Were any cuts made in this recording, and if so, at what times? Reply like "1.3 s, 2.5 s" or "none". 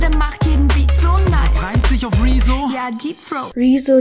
none